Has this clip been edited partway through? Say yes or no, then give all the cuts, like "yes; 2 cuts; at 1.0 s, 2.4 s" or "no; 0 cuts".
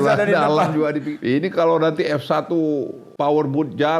yes; 2 cuts; at 1.1 s, 3.0 s